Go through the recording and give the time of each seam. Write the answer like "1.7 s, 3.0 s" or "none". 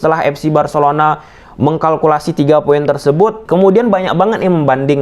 3.4 s